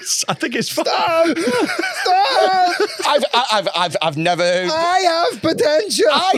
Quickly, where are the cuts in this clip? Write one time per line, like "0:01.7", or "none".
none